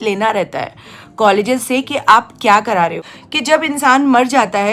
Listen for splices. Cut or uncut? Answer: cut